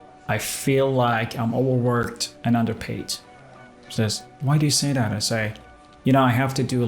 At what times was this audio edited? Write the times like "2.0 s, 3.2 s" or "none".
2.2 s